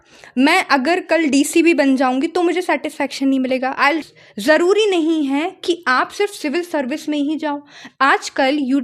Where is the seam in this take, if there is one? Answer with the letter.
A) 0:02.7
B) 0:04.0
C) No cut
B